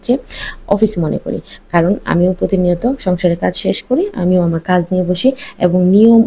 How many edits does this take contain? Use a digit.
0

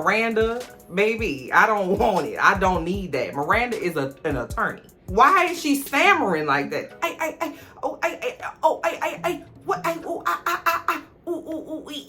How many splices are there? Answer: 1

